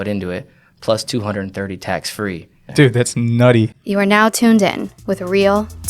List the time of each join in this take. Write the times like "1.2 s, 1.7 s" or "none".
2.6 s, 3.8 s